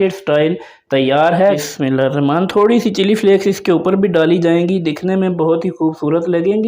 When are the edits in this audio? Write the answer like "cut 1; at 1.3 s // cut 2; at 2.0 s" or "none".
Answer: cut 1; at 1.6 s

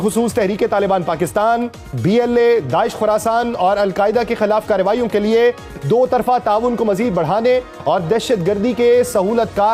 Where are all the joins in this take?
none

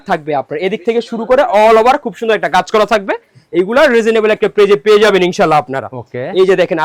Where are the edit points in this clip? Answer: none

